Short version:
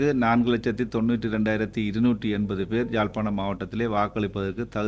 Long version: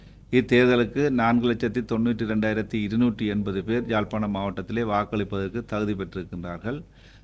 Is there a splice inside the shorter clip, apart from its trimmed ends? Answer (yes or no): no